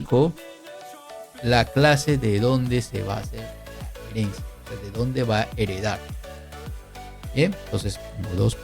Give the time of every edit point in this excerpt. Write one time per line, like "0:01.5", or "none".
none